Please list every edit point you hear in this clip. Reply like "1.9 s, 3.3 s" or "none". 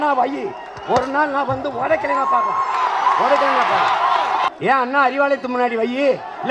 4.5 s